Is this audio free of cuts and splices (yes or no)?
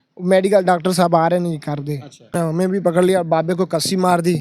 no